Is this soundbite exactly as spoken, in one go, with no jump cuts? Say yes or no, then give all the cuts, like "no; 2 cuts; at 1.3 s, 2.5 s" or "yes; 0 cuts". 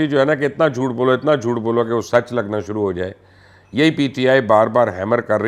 yes; 0 cuts